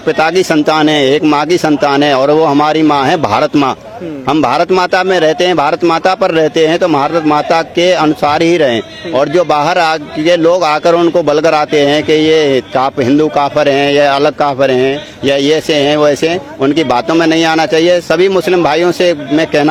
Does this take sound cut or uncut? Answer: uncut